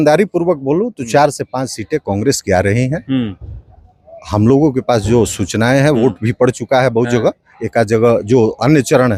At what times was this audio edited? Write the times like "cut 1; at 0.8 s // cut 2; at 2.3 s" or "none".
none